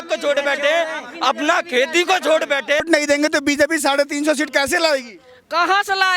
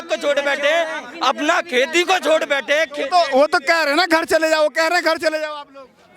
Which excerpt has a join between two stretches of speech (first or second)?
first